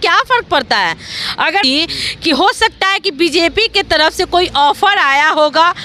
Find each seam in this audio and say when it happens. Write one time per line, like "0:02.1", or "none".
0:01.6